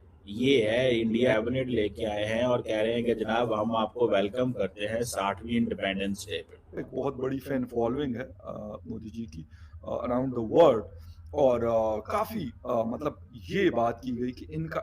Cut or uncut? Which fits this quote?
cut